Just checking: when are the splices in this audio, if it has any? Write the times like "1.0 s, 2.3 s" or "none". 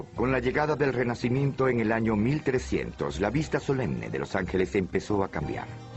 2.7 s